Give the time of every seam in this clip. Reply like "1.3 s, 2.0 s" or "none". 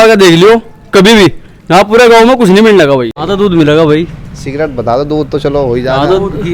3.2 s